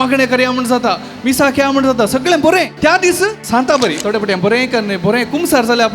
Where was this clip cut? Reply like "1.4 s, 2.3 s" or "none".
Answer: 3.0 s